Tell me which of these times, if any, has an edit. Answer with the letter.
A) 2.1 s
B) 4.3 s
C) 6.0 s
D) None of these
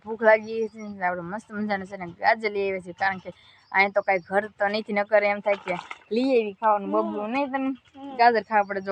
D